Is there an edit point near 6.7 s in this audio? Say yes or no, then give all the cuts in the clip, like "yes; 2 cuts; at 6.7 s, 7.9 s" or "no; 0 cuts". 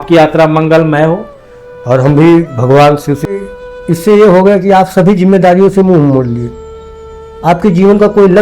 no; 1 cut; at 3.4 s